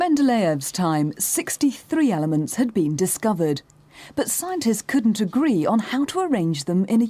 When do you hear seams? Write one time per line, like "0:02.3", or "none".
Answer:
0:05.9